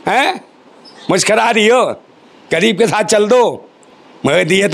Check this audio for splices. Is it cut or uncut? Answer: uncut